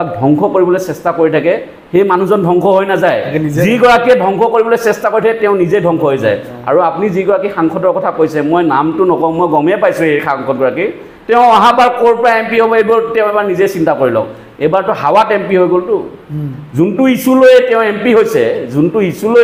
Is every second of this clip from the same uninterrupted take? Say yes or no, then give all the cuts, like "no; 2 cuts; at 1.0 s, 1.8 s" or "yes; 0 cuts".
yes; 0 cuts